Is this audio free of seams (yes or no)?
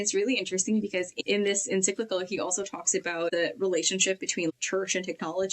no